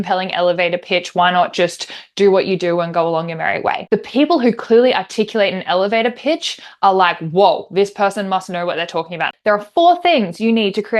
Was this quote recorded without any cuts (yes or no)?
no